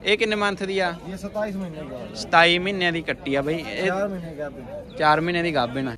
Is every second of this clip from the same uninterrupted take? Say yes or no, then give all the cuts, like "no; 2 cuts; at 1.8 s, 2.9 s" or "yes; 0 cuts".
yes; 0 cuts